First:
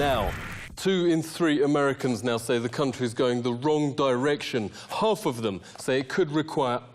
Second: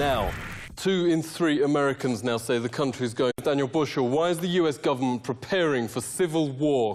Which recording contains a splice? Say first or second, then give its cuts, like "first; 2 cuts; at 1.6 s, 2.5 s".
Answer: first; 1 cut; at 3.3 s